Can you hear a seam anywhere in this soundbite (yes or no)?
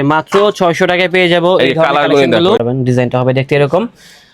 yes